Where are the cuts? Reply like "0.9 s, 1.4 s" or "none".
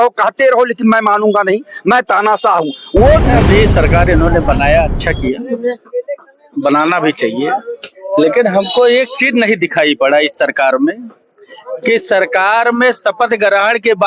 3.3 s